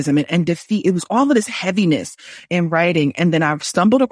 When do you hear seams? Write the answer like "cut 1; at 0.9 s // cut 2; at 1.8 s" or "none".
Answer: none